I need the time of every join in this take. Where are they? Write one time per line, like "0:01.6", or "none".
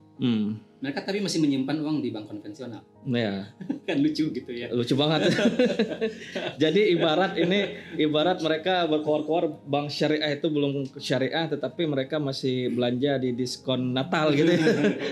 none